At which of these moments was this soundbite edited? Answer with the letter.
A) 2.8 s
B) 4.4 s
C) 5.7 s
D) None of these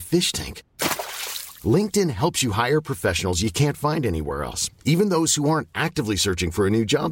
D